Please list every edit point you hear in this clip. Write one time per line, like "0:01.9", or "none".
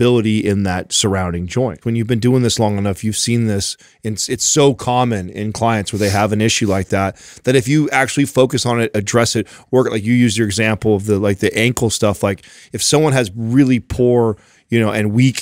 0:01.8